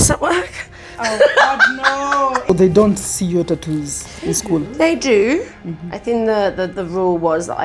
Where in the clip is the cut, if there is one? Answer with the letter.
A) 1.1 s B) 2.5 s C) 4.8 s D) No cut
B